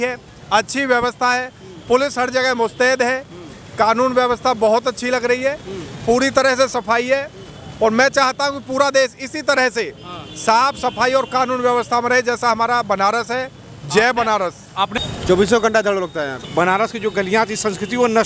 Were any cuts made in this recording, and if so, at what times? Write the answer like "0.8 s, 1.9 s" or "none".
14.9 s, 16.4 s